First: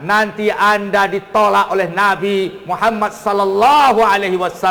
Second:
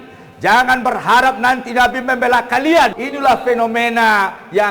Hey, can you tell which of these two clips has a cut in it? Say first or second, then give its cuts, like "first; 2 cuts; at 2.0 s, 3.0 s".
second; 1 cut; at 3.0 s